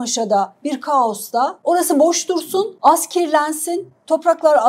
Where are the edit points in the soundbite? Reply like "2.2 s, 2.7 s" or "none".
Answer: 1.6 s, 2.7 s